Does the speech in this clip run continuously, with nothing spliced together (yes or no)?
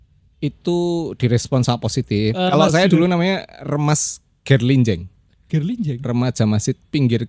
no